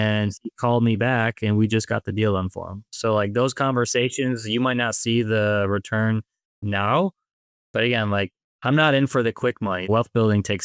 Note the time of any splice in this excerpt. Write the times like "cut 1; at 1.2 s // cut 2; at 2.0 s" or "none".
cut 1; at 8.4 s // cut 2; at 9.9 s